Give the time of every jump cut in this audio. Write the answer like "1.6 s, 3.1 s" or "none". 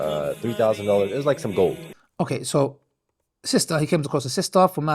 none